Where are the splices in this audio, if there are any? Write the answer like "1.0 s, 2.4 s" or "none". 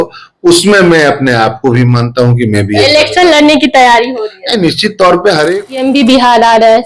5.7 s